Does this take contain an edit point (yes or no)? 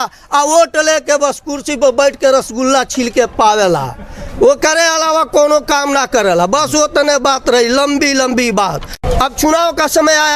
yes